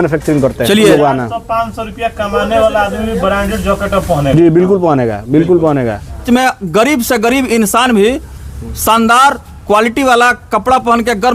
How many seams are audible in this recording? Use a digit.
2